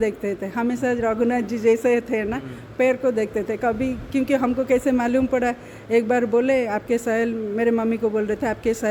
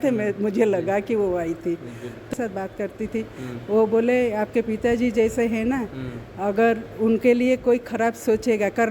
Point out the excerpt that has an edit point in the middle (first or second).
second